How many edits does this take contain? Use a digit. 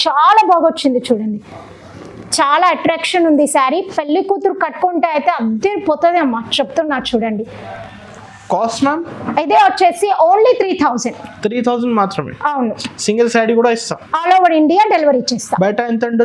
0